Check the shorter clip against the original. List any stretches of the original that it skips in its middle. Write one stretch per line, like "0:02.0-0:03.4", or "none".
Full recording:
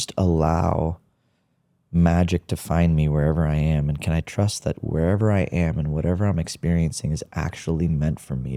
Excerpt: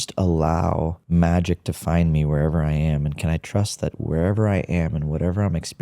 0:01.0-0:01.8